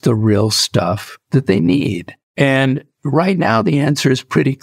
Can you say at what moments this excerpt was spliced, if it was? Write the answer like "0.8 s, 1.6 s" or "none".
none